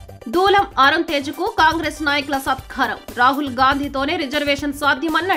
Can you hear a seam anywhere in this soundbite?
no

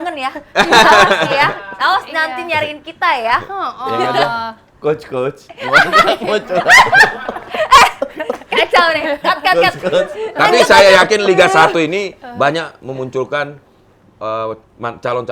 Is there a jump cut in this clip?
no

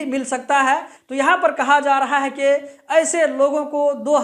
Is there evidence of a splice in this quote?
yes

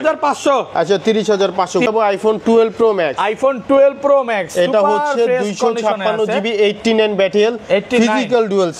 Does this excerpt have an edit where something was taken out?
yes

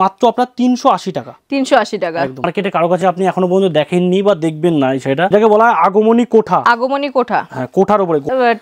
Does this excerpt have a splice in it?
yes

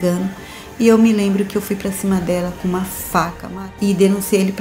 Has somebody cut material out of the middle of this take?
yes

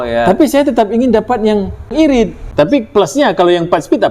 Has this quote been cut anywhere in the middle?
yes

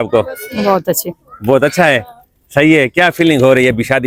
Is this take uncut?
yes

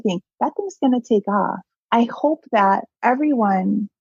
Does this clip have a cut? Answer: yes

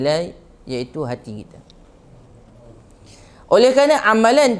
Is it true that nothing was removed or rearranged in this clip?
yes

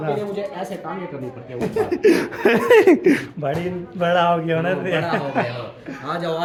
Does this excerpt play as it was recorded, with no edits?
yes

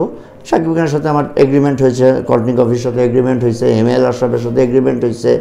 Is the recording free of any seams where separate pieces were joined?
yes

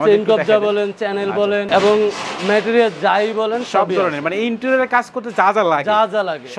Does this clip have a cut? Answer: no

